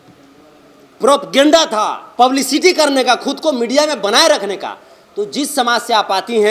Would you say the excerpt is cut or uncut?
uncut